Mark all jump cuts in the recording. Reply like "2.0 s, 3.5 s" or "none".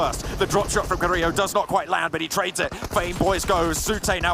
none